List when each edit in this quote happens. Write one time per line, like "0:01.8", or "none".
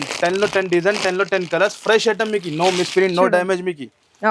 none